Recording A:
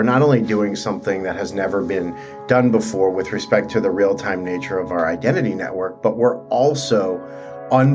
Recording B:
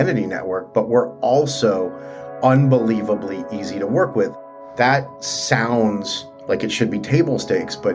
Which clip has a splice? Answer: B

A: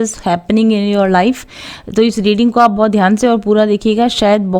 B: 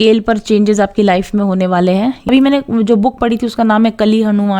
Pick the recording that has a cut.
B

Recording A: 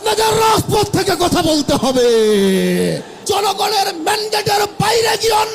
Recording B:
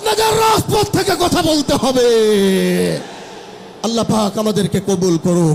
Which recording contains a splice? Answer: A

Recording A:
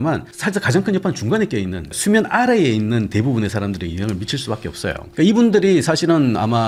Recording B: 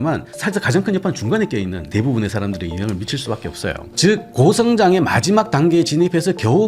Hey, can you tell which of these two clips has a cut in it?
B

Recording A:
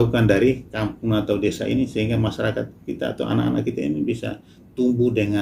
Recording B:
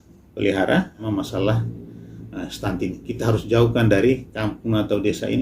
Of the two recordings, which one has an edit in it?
B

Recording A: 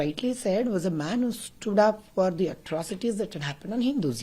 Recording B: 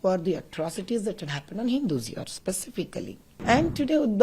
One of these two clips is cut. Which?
B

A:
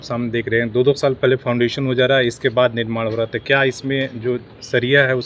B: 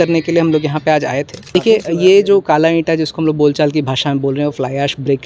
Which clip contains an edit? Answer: B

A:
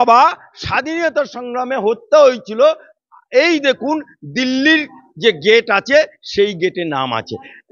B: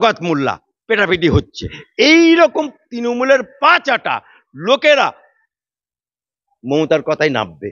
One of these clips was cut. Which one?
B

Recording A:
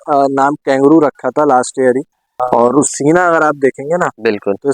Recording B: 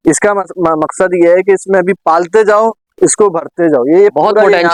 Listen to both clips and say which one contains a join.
A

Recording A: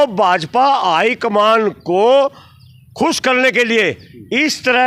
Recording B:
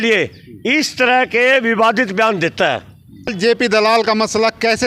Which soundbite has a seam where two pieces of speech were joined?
B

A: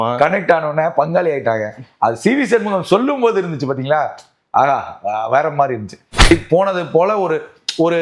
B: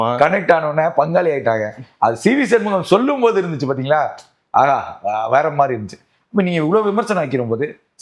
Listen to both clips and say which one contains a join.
A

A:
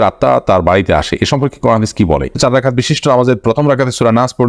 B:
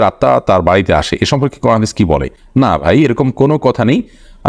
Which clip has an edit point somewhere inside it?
A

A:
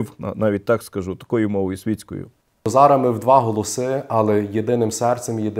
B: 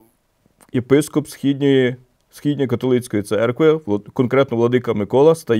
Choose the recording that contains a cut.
A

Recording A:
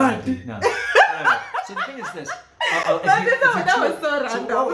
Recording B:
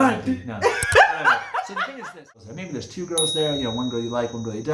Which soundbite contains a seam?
B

